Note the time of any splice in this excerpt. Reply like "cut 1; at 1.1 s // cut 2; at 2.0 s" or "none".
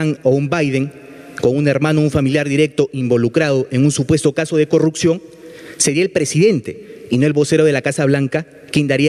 none